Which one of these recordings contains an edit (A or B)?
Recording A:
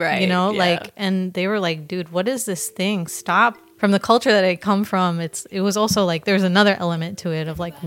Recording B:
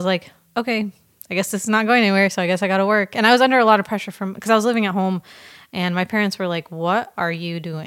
A